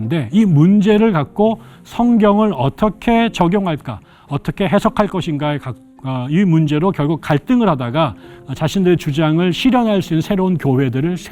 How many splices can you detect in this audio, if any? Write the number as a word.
one